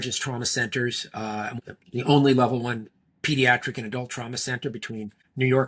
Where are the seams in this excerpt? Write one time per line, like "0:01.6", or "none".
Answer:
0:01.6